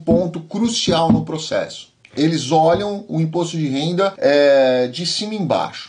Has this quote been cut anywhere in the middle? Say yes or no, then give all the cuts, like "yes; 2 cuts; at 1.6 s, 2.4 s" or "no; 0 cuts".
no; 0 cuts